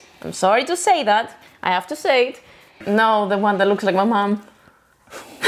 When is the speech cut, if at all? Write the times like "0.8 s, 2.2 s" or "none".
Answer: 2.8 s